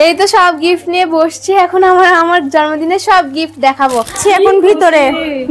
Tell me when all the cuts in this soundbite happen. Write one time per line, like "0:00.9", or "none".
0:04.2

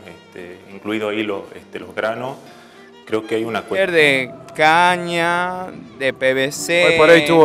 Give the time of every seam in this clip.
0:03.8

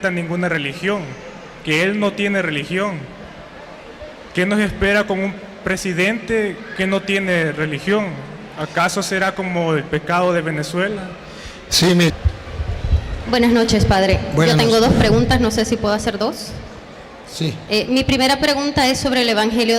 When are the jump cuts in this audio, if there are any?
0:12.1

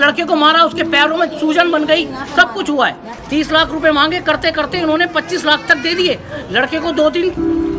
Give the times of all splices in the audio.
0:03.1

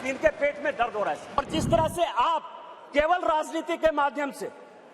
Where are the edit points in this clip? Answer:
0:01.4

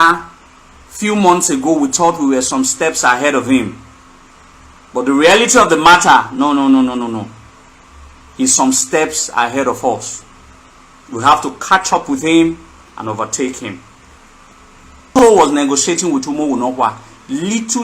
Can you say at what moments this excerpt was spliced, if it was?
0:15.1

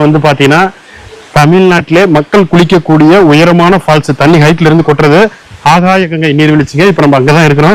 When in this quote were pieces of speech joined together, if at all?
none

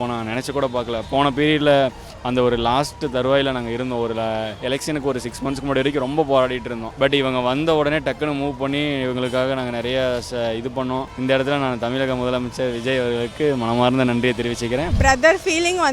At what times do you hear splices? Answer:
0:06.9
0:11.1
0:14.9

